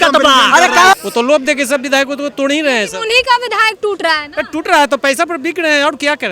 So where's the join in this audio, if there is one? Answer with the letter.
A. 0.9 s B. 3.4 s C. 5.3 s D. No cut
A